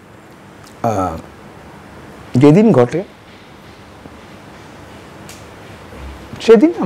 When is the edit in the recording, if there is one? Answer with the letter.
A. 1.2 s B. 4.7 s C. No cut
C